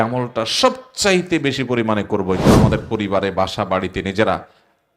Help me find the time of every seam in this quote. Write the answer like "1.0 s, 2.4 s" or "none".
2.5 s